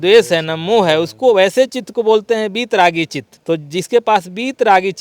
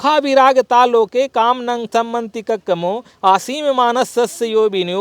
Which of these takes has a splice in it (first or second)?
first